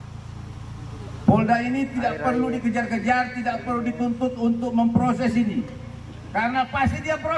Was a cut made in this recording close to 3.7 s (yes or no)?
no